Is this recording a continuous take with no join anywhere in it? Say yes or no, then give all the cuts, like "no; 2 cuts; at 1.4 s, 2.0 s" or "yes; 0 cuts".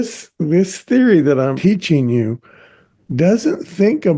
no; 1 cut; at 1.6 s